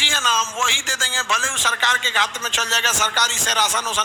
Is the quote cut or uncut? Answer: uncut